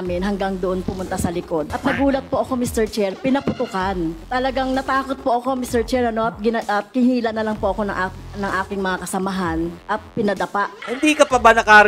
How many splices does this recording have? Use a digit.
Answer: 4